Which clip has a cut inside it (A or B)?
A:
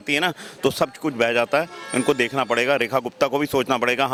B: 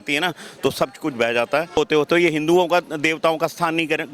B